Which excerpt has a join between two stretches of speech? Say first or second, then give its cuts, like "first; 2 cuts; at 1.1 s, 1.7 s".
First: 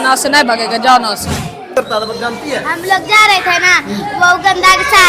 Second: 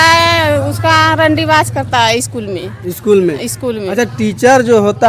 first; 1 cut; at 1.7 s